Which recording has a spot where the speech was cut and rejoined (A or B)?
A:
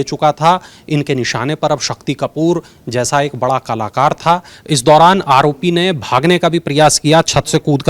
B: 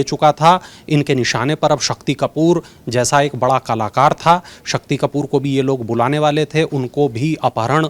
A